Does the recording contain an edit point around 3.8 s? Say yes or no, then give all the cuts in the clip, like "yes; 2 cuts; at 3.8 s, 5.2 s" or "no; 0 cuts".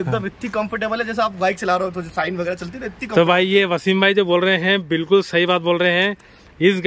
no; 0 cuts